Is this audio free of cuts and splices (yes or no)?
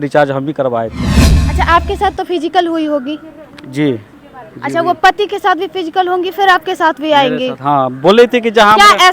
no